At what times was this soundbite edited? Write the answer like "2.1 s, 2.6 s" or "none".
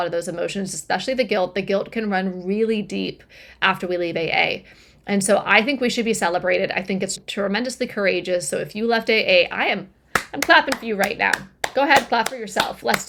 none